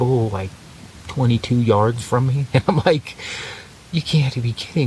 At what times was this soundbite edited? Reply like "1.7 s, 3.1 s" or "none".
none